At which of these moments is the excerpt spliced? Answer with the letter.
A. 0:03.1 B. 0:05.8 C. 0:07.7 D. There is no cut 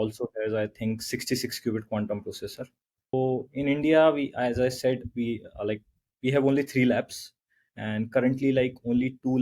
A